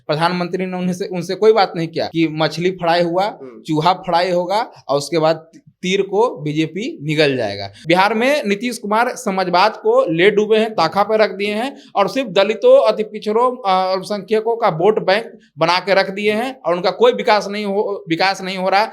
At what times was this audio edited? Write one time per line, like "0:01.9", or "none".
0:02.0
0:07.7